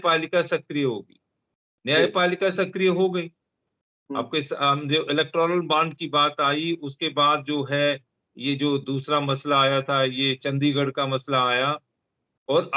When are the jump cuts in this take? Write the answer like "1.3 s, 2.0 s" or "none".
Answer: none